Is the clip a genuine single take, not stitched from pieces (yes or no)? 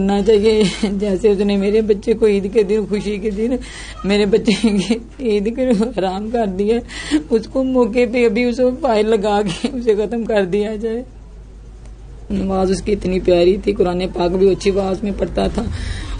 no